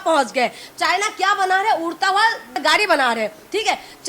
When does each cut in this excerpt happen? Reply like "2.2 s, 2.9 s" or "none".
2.6 s